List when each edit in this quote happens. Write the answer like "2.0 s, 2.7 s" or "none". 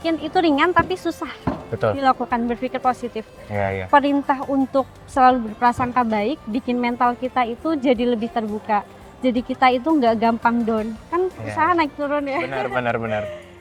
none